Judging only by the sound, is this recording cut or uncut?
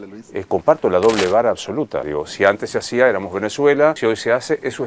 cut